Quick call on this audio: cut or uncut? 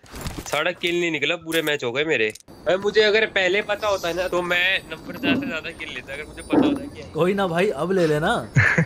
cut